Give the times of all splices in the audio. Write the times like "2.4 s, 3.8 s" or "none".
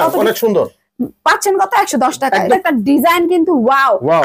2.5 s